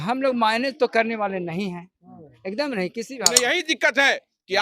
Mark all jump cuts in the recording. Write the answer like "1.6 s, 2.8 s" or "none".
3.3 s